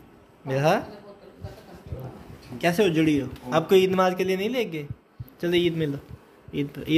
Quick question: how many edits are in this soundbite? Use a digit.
0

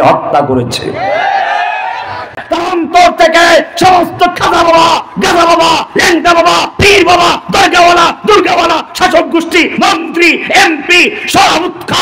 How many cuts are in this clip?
1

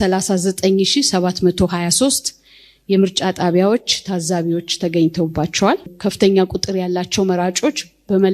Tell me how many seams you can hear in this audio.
1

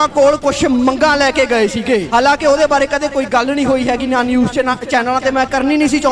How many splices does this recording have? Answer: 1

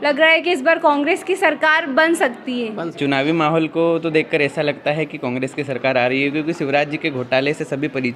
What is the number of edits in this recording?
1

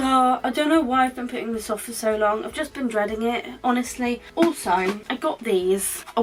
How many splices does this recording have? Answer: 0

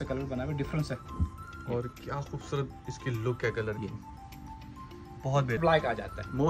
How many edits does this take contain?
1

